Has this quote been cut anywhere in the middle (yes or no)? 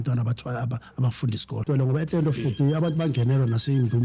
yes